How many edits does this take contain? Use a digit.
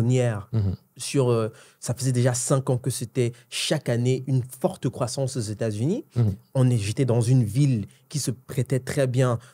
2